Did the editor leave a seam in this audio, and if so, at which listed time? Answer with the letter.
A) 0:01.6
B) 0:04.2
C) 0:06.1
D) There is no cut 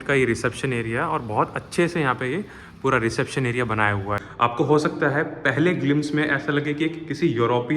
B